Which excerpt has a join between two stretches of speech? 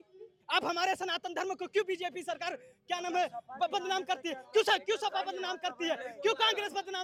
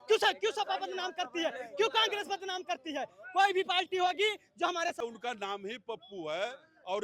second; 1 cut; at 5.0 s

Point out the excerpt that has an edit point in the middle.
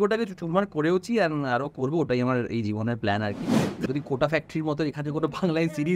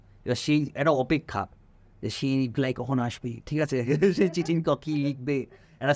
first; 1 cut; at 3.7 s

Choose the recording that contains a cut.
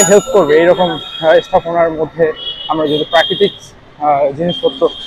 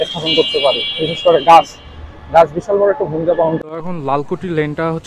second; 1 cut; at 3.6 s

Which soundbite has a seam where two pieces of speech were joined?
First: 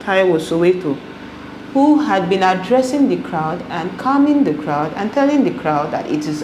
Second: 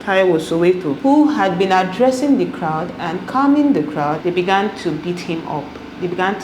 second; 2 cuts; at 1.0 s, 4.2 s

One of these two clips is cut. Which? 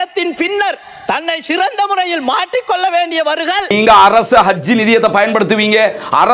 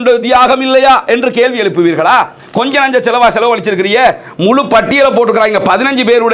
first; 1 cut; at 3.7 s

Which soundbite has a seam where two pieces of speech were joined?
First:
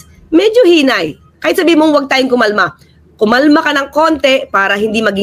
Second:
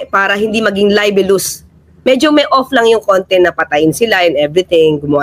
second; 1 cut; at 1.8 s

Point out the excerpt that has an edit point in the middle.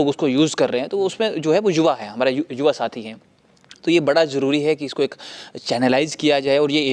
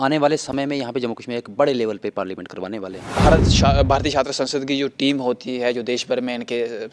second; 1 cut; at 3.2 s

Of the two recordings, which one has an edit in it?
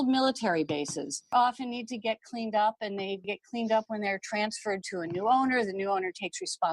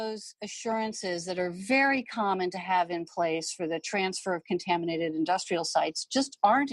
first; 1 cut; at 1.3 s

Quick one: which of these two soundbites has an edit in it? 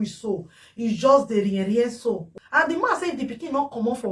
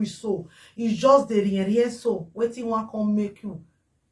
first; 1 cut; at 2.3 s

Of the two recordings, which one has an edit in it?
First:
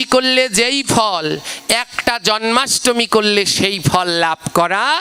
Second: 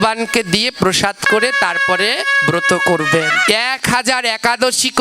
second; 1 cut; at 3.4 s

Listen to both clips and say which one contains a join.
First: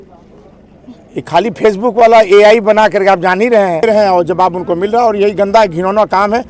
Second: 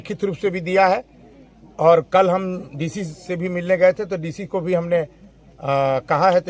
first; 1 cut; at 3.8 s

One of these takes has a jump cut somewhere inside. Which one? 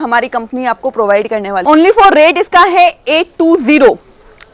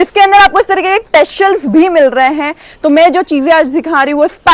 first; 1 cut; at 1.5 s

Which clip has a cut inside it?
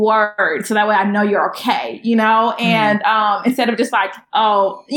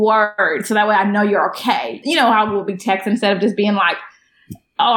second; 1 cut; at 1.9 s

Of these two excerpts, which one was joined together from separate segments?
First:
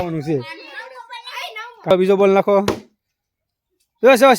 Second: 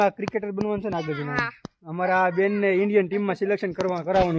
first; 1 cut; at 1.9 s

